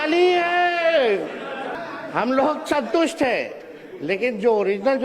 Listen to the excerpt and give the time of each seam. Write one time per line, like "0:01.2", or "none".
0:01.7